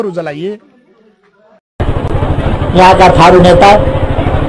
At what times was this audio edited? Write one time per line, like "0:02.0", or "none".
0:01.6